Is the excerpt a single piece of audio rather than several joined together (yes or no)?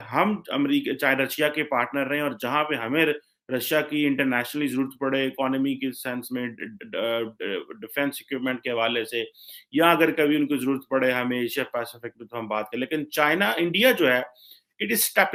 yes